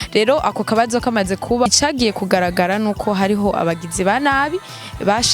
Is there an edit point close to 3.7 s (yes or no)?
no